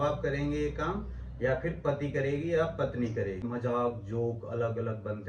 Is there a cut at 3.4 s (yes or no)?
yes